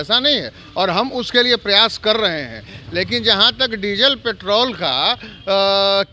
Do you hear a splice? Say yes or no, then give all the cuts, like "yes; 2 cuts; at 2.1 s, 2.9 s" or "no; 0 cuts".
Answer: no; 0 cuts